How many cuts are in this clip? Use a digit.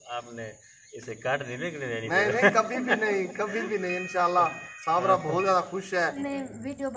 1